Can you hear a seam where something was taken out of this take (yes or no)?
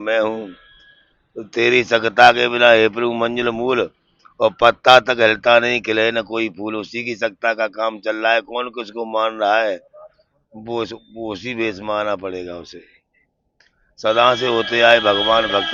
no